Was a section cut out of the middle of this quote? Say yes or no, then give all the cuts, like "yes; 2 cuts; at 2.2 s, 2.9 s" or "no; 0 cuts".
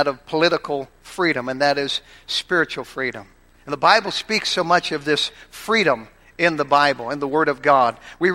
no; 0 cuts